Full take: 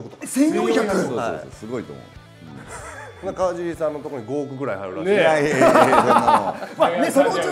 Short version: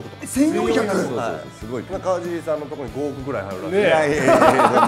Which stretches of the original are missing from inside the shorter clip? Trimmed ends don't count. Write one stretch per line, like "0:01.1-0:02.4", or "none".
0:01.9-0:03.2